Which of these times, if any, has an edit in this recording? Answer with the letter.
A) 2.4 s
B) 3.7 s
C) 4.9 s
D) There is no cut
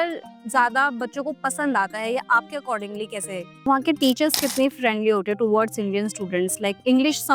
B